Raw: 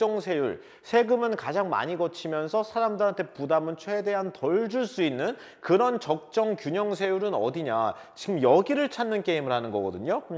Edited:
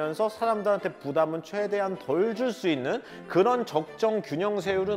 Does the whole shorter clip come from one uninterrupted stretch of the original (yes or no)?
yes